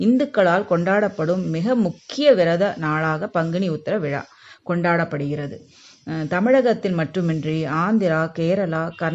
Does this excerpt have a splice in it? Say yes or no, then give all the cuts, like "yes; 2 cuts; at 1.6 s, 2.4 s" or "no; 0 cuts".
no; 0 cuts